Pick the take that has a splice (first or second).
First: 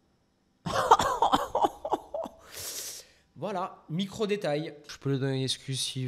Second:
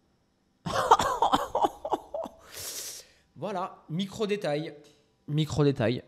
first